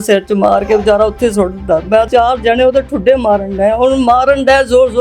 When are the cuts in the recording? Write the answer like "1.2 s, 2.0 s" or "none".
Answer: 2.1 s

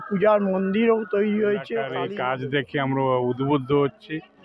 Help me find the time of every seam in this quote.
1.9 s

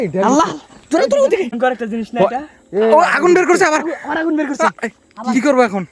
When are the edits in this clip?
1.6 s

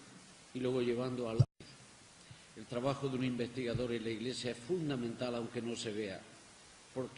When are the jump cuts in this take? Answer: none

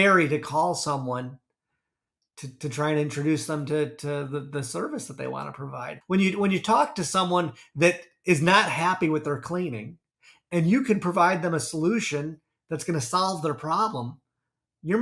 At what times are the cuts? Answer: 5.9 s

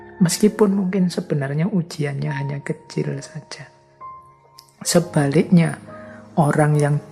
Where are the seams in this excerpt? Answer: none

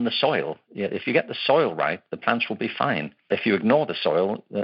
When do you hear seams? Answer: 3.3 s

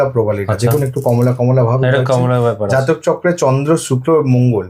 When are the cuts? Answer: none

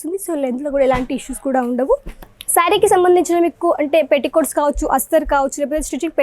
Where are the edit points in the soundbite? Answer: 2.4 s

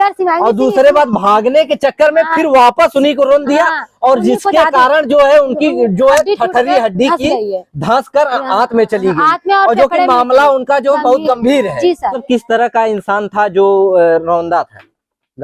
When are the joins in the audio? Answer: 12.2 s

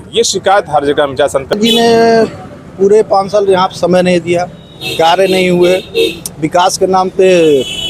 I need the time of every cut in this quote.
1.5 s

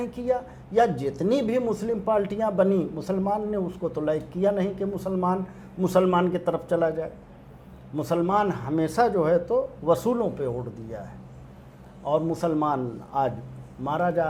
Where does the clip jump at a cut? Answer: none

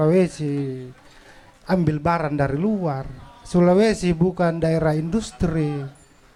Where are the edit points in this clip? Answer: none

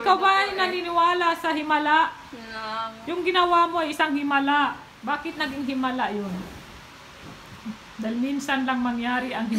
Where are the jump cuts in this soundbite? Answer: 3.0 s, 4.9 s

